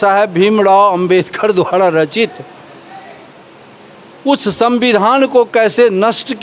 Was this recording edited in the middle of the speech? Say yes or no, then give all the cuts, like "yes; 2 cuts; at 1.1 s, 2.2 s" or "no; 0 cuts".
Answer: no; 0 cuts